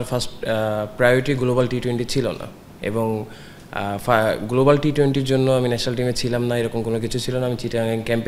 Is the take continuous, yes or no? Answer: yes